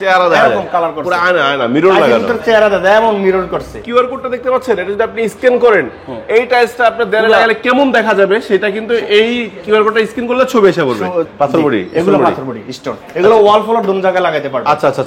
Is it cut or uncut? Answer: cut